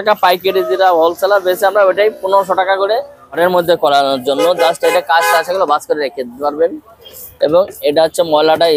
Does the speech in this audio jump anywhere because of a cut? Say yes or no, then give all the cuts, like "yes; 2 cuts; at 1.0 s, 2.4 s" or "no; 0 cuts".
yes; 1 cut; at 3.4 s